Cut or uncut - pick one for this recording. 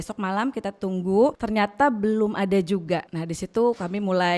cut